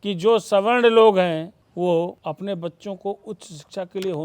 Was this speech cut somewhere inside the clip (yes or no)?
yes